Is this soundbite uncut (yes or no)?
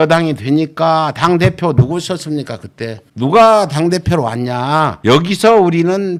yes